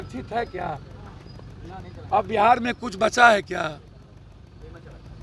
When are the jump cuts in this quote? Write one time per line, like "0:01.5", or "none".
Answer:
none